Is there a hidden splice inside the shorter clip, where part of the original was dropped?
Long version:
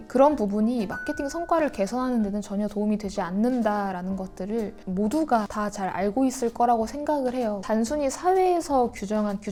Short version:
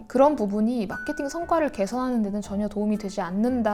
no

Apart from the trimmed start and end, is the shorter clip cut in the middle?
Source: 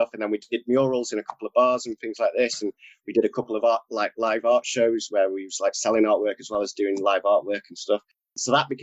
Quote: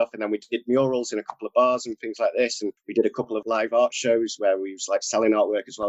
yes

